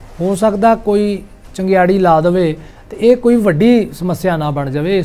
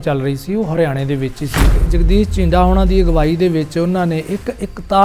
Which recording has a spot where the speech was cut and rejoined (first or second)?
second